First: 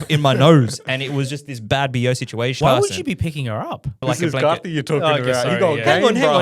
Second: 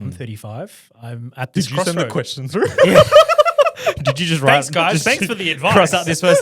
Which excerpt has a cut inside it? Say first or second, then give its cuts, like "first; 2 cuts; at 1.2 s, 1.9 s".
first; 2 cuts; at 2.6 s, 4.0 s